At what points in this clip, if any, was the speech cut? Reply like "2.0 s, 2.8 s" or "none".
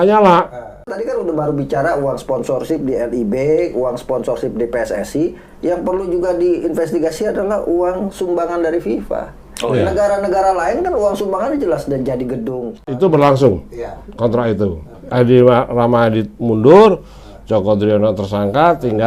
1.0 s, 12.8 s